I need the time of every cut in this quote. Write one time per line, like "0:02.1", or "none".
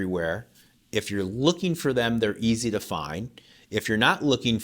none